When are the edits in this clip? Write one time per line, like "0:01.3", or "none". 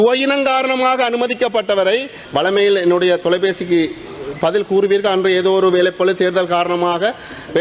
0:02.2